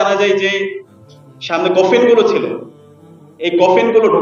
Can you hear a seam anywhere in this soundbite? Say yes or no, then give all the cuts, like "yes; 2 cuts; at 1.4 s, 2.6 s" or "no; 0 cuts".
no; 0 cuts